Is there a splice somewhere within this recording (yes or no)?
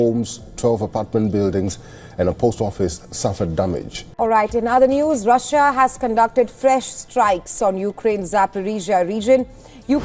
yes